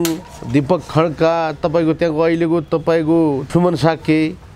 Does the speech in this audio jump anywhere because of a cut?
yes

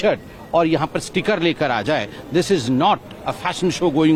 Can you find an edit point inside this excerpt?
no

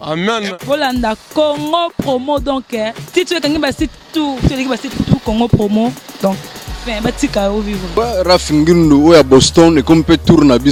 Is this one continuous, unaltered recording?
yes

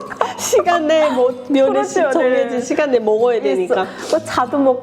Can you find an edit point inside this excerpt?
no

